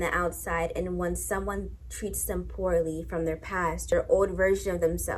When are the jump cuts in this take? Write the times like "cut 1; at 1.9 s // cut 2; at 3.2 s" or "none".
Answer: cut 1; at 3.9 s